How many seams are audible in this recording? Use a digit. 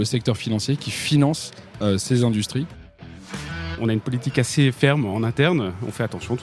1